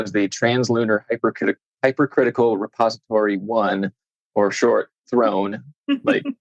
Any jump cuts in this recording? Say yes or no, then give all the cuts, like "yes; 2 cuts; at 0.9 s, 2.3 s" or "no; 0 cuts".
no; 0 cuts